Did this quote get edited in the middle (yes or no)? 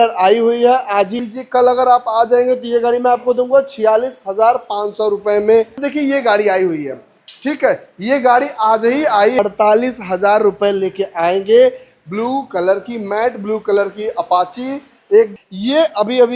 yes